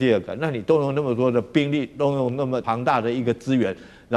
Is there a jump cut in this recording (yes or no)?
yes